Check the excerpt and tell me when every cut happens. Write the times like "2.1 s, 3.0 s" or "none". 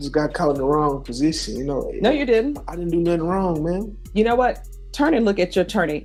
none